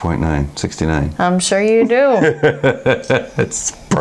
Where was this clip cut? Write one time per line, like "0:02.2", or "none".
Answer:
none